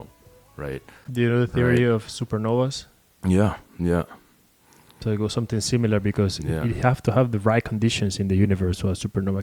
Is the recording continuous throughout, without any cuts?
no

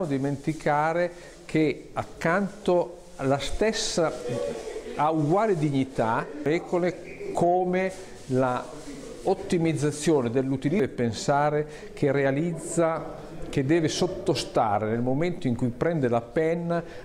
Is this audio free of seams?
no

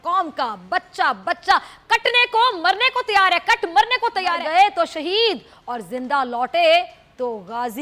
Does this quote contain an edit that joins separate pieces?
yes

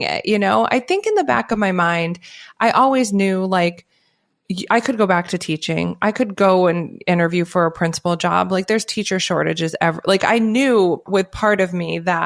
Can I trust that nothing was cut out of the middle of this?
no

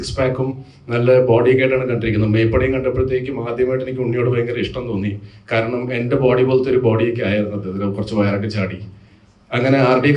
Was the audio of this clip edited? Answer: no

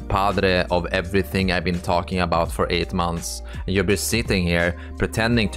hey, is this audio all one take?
yes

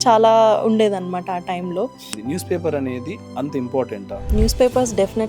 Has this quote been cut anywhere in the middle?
yes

